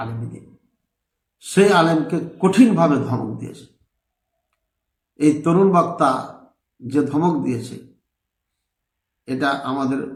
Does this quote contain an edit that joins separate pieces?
no; 0 cuts

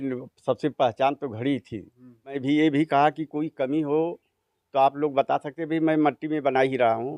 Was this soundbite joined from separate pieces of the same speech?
yes; 1 cut; at 2.4 s

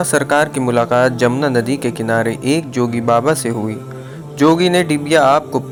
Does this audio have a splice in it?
no; 0 cuts

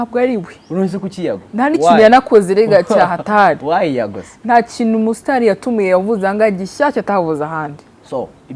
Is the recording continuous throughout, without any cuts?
yes; 0 cuts

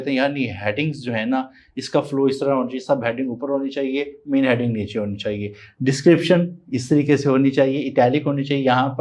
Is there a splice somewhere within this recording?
no; 0 cuts

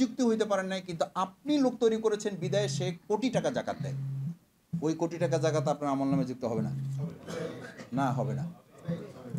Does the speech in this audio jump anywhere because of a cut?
no; 0 cuts

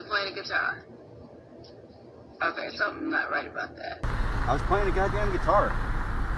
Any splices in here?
yes; 1 cut; at 4.0 s

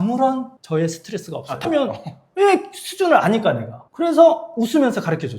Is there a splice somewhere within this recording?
no; 0 cuts

